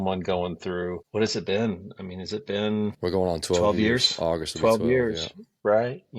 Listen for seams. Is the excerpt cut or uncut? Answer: cut